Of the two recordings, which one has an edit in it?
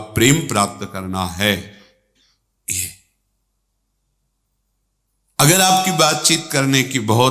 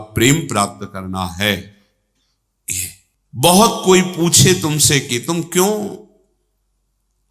second; 1 cut; at 3.1 s

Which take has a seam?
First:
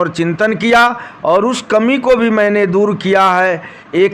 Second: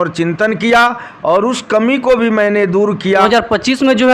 second; 1 cut; at 3.2 s

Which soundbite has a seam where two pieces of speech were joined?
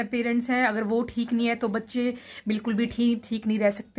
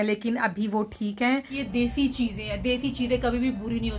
second; 1 cut; at 1.6 s

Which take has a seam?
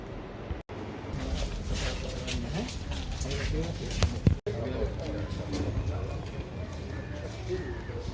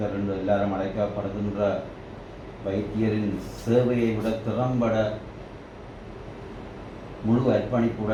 first; 1 cut; at 1.1 s

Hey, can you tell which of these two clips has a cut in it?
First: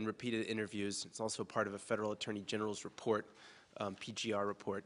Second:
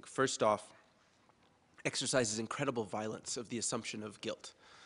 first; 1 cut; at 2.6 s

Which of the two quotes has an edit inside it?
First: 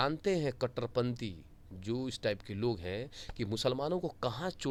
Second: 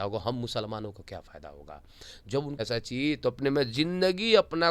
second; 1 cut; at 2.6 s

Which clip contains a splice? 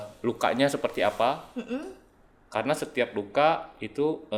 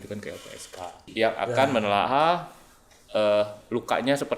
second; 1 cut; at 1.0 s

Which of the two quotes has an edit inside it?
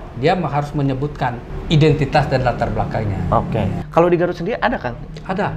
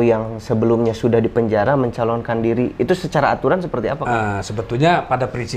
first; 2 cuts; at 1.5 s, 3.8 s

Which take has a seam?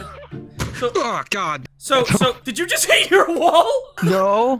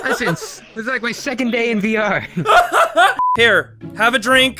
second; 1 cut; at 3.3 s

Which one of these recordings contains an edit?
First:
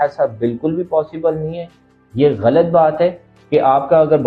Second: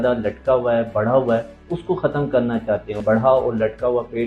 second; 1 cut; at 3.0 s

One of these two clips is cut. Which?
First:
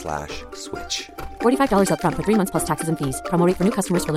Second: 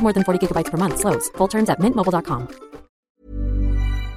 second; 1 cut; at 3.1 s

